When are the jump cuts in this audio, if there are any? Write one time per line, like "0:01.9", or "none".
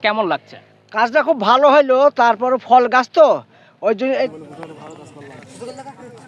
0:04.3